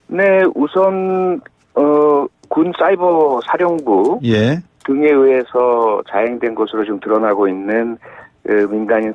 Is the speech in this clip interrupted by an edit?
no; 0 cuts

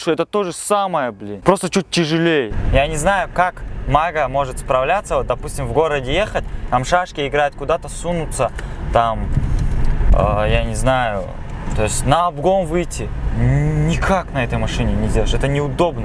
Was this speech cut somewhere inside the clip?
no; 0 cuts

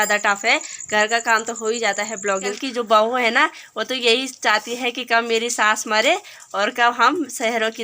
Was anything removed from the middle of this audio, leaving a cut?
yes; 1 cut; at 2.6 s

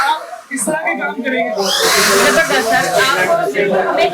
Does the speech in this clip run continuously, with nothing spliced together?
yes; 0 cuts

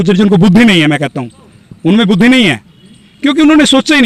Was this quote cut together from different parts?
no; 0 cuts

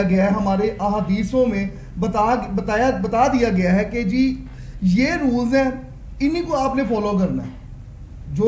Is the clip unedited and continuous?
yes; 0 cuts

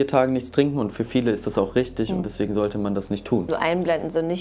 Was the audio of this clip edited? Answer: yes; 1 cut; at 3.5 s

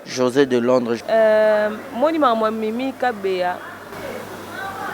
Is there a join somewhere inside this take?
yes; 1 cut; at 1.0 s

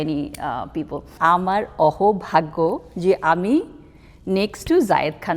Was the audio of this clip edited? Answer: yes; 1 cut; at 1.1 s

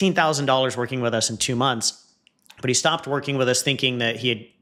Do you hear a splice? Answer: no; 0 cuts

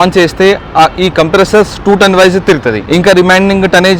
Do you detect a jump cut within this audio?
no; 0 cuts

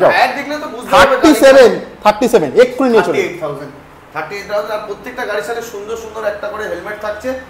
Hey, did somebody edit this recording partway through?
no; 0 cuts

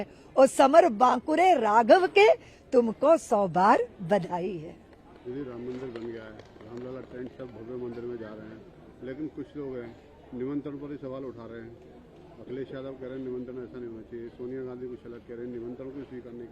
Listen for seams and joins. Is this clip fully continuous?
yes; 0 cuts

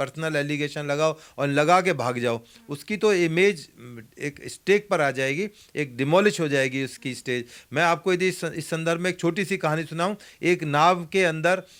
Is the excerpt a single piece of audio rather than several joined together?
yes; 0 cuts

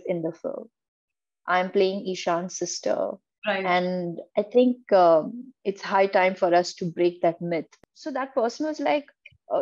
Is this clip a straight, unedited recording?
no; 1 cut; at 7.7 s

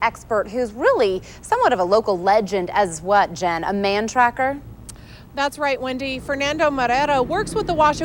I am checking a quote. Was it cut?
no; 0 cuts

